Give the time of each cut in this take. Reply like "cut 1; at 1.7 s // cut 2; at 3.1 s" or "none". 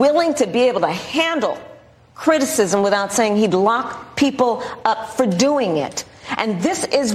none